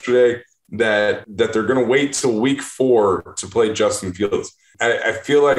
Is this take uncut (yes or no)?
no